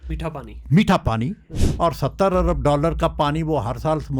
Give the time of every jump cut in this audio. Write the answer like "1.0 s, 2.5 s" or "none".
1.5 s